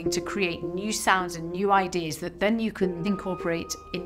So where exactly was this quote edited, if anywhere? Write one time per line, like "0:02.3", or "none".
0:03.1